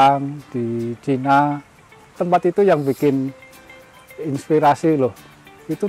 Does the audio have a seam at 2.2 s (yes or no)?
yes